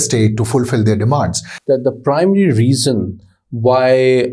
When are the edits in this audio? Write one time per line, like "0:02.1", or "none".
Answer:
0:01.5